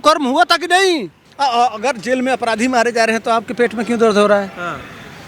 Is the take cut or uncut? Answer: cut